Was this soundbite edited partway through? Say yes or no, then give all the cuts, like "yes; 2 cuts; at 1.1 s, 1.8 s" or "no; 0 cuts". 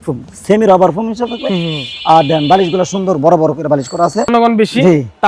yes; 1 cut; at 4.3 s